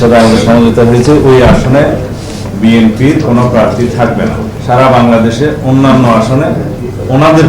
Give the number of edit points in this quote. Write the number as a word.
one